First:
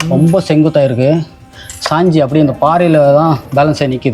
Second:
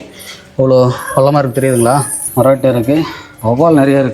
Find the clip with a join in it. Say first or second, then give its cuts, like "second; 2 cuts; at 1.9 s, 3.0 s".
second; 2 cuts; at 2.2 s, 3.2 s